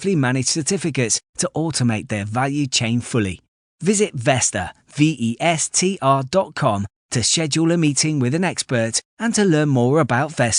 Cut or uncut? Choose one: uncut